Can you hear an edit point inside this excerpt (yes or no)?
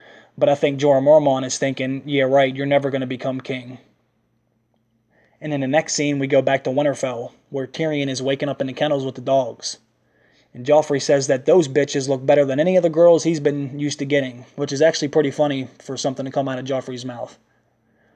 yes